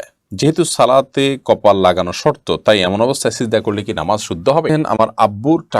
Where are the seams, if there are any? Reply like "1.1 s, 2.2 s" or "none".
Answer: 4.7 s